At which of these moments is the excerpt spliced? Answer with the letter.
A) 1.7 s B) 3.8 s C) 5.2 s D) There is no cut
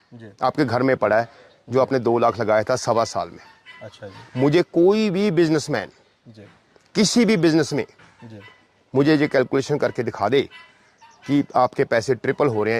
D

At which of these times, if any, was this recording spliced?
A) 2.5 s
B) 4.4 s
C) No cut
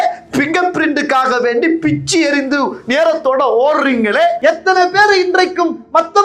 B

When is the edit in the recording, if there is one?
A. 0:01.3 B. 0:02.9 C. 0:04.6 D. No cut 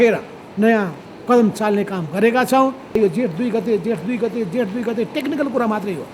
B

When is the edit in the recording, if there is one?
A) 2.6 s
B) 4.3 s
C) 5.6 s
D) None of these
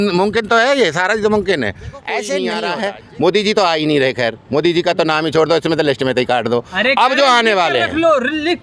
A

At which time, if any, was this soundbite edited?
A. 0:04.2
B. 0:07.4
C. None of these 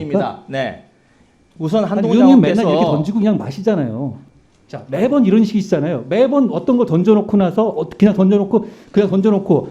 A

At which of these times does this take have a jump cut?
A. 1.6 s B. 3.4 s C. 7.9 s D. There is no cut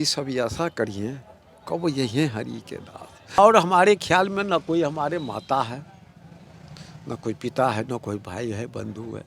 B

